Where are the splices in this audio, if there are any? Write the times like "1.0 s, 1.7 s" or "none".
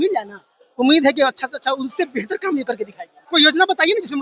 3.1 s